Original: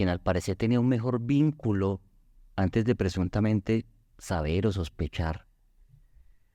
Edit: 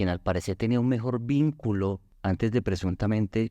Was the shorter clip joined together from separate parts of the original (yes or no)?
yes